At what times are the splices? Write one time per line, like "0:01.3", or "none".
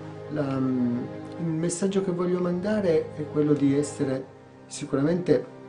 none